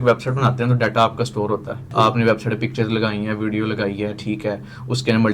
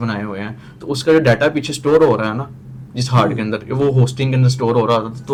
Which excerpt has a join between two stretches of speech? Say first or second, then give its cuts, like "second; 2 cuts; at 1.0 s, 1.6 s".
first; 1 cut; at 1.9 s